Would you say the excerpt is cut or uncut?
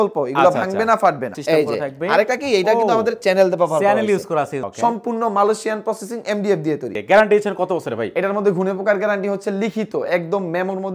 cut